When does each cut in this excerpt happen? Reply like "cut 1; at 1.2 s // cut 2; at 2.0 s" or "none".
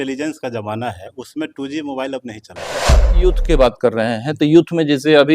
cut 1; at 3.0 s